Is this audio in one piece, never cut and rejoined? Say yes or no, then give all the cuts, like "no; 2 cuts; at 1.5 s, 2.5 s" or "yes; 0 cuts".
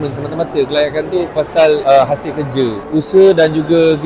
no; 1 cut; at 2.8 s